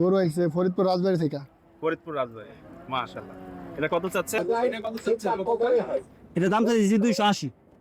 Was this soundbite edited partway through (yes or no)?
yes